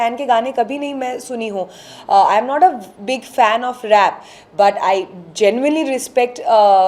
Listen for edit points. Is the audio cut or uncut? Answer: uncut